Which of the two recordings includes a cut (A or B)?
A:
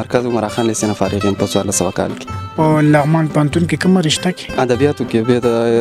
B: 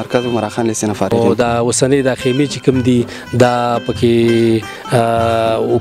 B